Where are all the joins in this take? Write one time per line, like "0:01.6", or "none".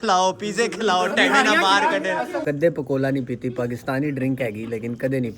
0:02.4